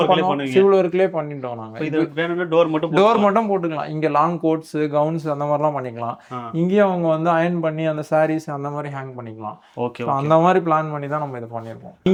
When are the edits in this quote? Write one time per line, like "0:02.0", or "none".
none